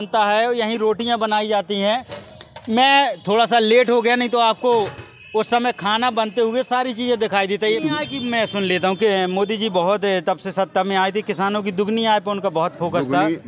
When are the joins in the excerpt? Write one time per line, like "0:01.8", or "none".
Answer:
0:07.8